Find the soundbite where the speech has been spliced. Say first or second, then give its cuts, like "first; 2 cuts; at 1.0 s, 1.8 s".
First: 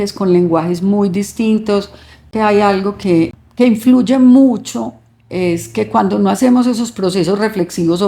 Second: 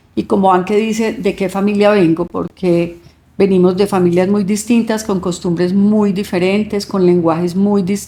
first; 2 cuts; at 2.3 s, 3.4 s